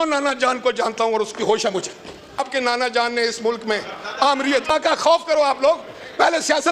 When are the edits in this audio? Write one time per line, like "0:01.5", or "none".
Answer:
0:02.4
0:04.7